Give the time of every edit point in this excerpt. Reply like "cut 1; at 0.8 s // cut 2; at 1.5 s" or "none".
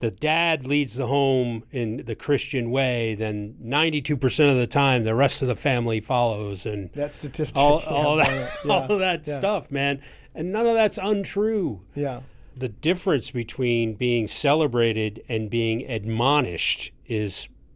cut 1; at 12.6 s

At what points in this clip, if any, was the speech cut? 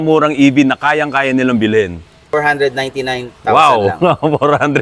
cut 1; at 2.3 s

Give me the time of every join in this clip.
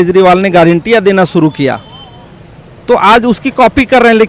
none

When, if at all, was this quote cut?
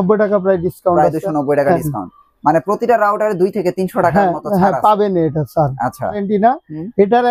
cut 1; at 6.2 s

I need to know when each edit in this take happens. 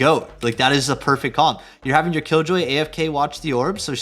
none

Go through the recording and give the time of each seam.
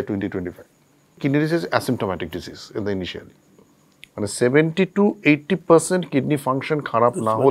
cut 1; at 1.2 s

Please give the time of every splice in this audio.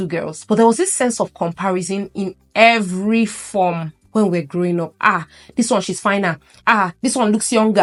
none

